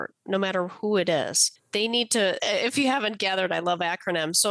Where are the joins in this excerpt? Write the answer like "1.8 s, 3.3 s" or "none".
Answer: 1.5 s